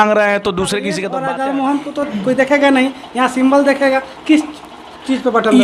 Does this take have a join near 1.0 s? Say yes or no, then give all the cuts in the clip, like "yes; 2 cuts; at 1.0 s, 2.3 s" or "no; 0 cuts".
yes; 1 cut; at 1.0 s